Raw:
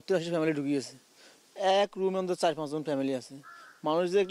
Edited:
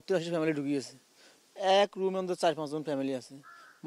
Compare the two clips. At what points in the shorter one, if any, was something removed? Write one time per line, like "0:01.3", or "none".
none